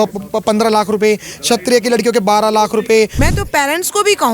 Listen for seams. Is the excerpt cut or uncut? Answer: cut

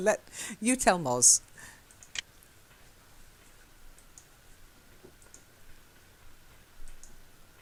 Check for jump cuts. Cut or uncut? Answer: uncut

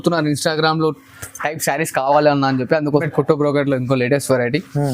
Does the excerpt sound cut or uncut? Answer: cut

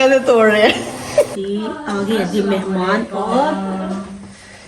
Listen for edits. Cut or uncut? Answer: cut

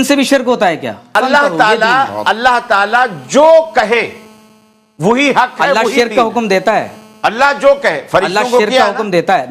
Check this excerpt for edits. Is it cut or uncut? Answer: cut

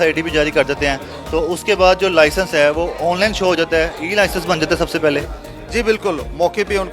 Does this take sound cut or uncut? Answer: uncut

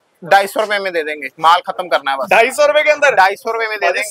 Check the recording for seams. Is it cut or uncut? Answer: uncut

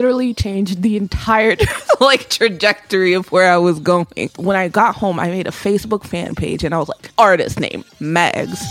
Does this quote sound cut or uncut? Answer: cut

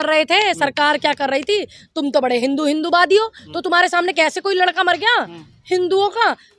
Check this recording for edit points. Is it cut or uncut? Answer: uncut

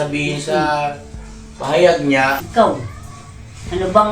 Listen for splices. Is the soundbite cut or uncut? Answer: cut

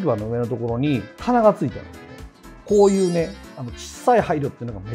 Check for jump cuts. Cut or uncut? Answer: uncut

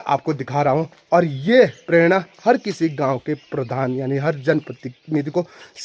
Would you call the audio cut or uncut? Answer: uncut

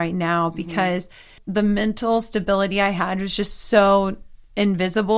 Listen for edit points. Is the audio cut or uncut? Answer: cut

